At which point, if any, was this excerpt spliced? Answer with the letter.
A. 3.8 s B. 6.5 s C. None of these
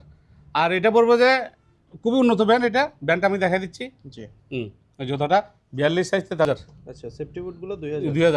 B